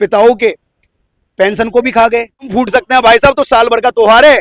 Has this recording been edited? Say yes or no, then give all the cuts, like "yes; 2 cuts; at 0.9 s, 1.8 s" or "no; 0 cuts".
yes; 1 cut; at 2.5 s